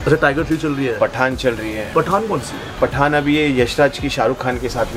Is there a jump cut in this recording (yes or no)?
no